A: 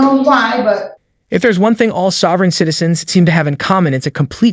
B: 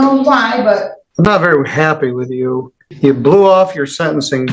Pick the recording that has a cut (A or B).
B